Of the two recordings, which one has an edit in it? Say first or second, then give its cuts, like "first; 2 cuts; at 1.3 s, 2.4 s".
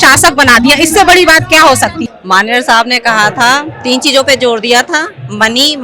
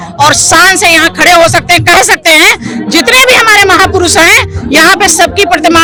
first; 1 cut; at 2.0 s